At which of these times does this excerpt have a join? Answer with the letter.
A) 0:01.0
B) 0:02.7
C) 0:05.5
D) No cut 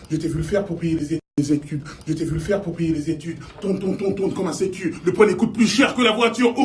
D